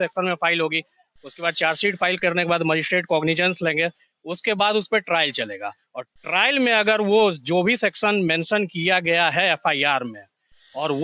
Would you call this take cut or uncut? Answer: uncut